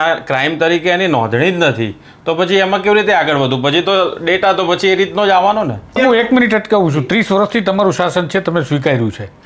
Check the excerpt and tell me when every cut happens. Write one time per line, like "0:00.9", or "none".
0:06.0